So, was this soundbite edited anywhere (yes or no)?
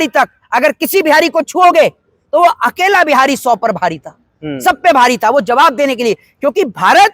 no